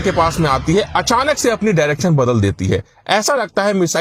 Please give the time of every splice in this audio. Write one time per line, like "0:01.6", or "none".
none